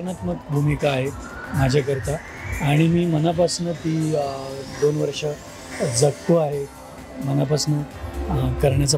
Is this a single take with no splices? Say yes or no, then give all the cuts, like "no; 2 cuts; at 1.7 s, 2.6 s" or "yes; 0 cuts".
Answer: yes; 0 cuts